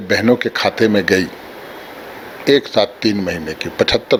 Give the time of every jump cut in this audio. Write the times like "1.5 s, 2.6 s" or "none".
none